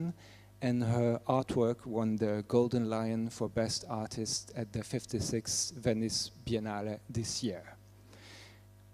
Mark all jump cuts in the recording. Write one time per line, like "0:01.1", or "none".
0:03.8